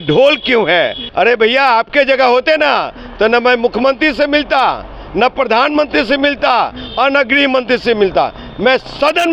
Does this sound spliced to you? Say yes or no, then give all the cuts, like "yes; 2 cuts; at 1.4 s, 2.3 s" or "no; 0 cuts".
yes; 1 cut; at 1.0 s